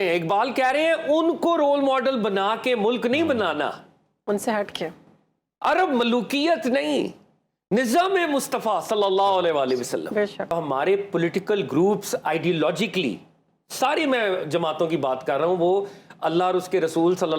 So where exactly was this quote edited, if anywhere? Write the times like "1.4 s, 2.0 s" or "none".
10.5 s